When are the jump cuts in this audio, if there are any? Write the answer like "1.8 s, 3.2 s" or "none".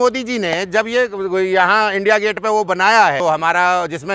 3.2 s